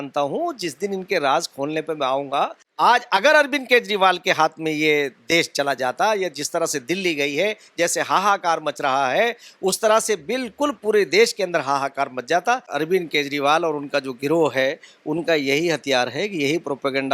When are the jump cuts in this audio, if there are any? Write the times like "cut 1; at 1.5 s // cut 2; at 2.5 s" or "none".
cut 1; at 2.6 s // cut 2; at 12.7 s